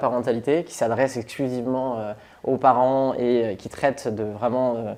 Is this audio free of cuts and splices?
yes; 0 cuts

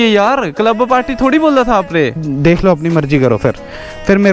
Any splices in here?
yes; 1 cut; at 2.2 s

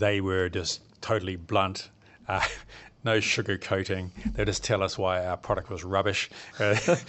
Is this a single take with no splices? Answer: yes; 0 cuts

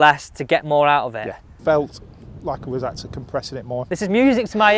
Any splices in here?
yes; 2 cuts; at 1.5 s, 3.9 s

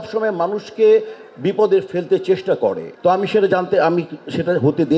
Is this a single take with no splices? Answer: yes; 0 cuts

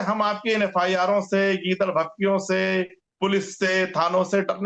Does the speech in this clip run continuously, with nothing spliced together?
yes; 0 cuts

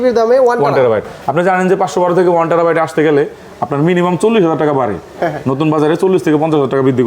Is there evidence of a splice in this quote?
no; 0 cuts

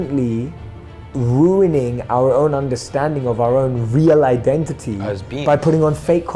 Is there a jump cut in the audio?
no; 0 cuts

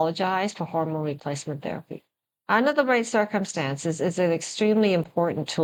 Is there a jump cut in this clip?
no; 0 cuts

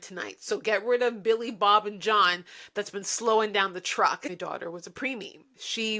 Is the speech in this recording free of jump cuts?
no; 1 cut; at 4.2 s

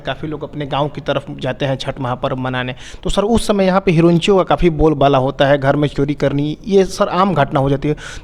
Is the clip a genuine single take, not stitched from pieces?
yes; 0 cuts

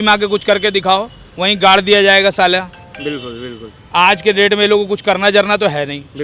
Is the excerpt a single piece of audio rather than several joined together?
yes; 0 cuts

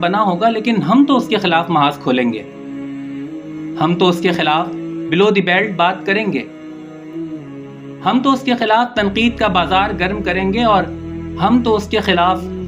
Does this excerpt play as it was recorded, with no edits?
yes; 0 cuts

